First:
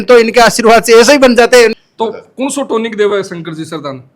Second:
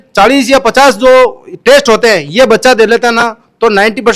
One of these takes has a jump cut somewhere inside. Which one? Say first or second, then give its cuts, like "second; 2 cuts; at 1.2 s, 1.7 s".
first; 1 cut; at 1.8 s